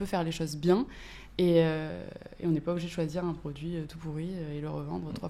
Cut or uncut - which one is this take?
uncut